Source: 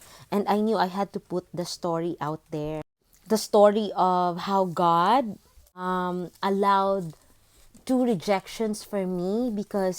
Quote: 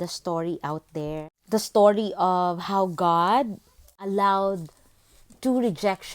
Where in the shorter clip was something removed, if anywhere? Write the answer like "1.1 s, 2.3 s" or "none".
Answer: 1.3 s, 3.9 s